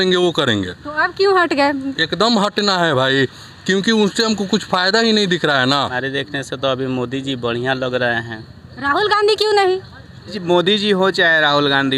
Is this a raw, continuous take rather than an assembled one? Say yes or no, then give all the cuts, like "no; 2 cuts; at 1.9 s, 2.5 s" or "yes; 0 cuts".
no; 2 cuts; at 6.0 s, 10.4 s